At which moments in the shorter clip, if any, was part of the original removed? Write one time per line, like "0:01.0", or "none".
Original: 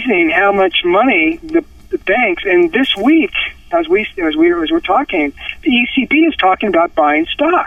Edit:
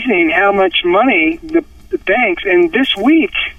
none